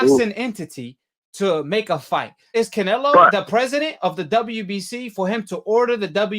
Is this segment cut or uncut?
cut